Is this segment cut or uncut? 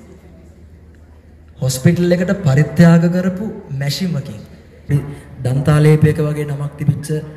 cut